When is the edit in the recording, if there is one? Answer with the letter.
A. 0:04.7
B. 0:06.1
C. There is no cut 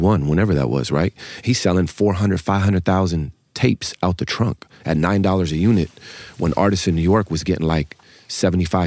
C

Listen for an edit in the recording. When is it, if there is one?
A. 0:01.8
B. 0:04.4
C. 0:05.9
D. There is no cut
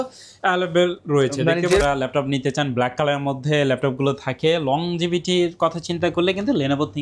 A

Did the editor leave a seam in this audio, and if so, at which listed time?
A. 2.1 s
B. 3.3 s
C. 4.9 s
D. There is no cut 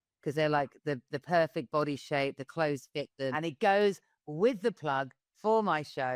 B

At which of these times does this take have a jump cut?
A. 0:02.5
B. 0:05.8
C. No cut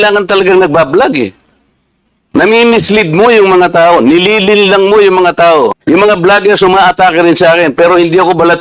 B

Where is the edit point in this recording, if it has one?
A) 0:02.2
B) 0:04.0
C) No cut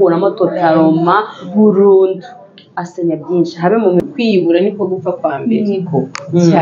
B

